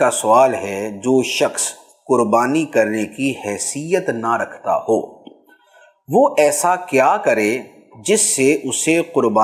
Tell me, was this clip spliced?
no; 0 cuts

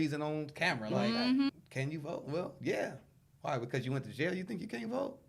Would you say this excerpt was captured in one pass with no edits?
no; 1 cut; at 1.5 s

